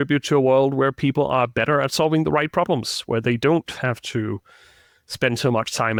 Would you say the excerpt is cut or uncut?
uncut